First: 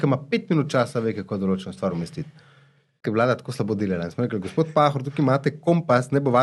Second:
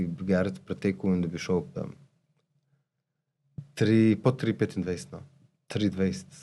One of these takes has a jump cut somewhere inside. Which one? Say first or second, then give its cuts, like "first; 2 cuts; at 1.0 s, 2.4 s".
first; 1 cut; at 3.0 s